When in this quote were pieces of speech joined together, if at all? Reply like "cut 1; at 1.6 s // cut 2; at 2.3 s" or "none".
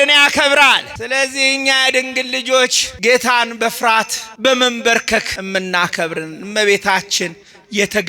cut 1; at 0.9 s // cut 2; at 2.9 s // cut 3; at 4.2 s // cut 4; at 5.3 s